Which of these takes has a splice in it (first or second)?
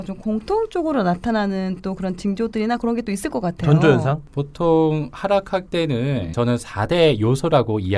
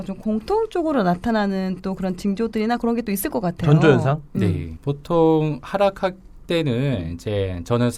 first